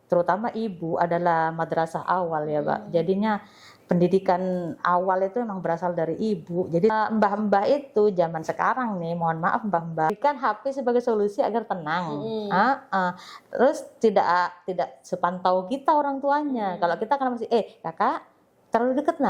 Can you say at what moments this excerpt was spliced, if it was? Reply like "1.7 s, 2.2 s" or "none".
6.9 s, 10.1 s